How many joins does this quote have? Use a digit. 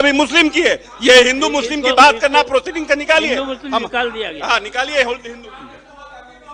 0